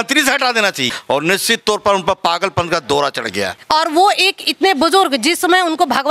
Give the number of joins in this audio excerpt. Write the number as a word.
two